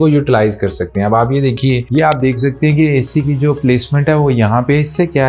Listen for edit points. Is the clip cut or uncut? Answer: cut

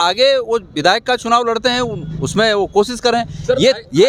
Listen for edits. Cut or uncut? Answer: uncut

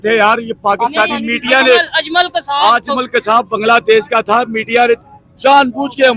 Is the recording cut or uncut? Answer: uncut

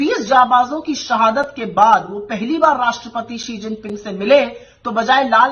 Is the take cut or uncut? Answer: uncut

